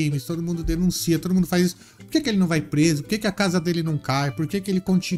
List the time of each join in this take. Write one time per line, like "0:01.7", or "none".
none